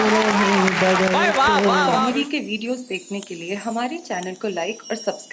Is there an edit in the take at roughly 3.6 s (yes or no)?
no